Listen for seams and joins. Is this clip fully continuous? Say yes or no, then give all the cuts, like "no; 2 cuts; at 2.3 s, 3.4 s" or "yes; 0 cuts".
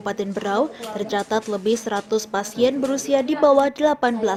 yes; 0 cuts